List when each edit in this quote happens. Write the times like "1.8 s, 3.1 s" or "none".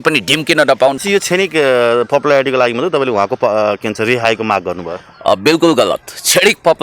1.0 s